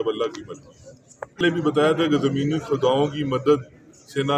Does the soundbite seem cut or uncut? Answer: uncut